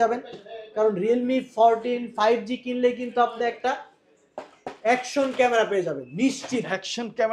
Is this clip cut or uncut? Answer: uncut